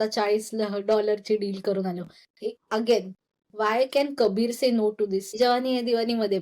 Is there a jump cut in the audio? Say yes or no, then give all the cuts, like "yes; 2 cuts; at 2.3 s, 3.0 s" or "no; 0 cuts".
yes; 1 cut; at 5.4 s